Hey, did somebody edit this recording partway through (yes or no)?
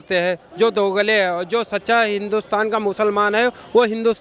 no